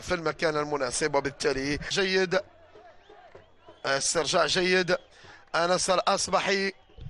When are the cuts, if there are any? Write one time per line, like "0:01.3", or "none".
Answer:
0:02.9